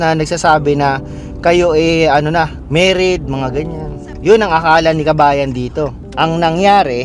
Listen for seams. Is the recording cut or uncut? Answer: cut